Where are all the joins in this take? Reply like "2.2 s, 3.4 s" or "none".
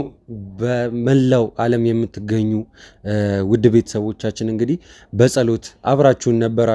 none